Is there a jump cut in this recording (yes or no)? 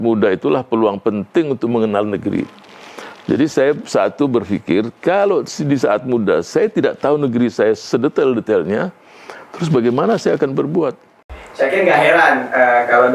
yes